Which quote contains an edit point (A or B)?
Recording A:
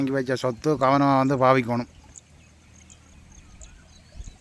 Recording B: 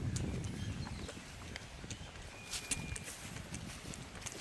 B